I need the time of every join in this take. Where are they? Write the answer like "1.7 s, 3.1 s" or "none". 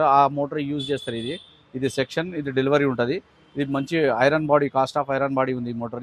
none